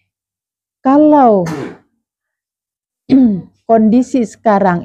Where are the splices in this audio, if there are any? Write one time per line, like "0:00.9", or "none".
none